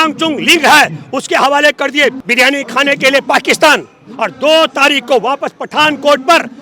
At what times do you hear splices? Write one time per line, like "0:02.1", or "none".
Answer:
0:02.2